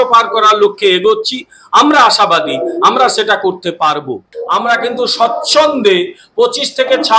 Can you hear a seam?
yes; 1 cut; at 4.3 s

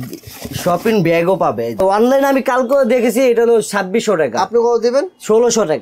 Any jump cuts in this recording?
yes; 1 cut; at 1.8 s

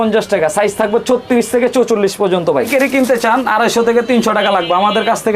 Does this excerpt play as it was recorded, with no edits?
no; 1 cut; at 2.7 s

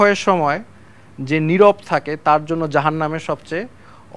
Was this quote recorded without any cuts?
yes; 0 cuts

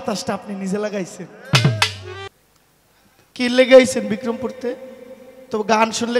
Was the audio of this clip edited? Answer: yes; 1 cut; at 2.2 s

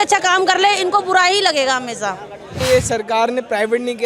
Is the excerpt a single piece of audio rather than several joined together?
no; 1 cut; at 2.5 s

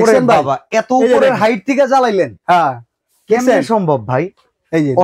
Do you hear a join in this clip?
no; 0 cuts

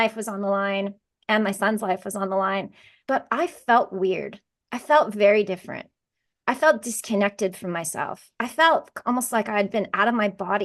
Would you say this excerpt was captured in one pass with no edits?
no; 1 cut; at 2.9 s

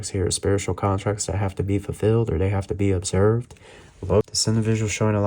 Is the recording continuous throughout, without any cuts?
no; 1 cut; at 4.3 s

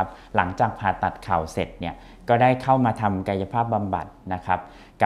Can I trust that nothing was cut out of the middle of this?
yes; 0 cuts

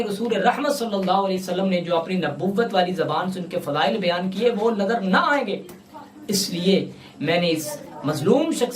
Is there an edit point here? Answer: no; 0 cuts

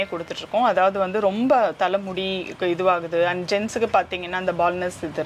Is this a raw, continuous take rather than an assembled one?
yes; 0 cuts

